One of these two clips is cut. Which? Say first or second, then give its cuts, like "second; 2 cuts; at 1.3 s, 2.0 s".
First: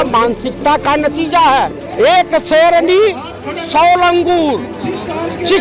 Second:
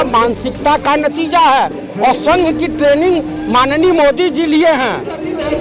first; 1 cut; at 1.8 s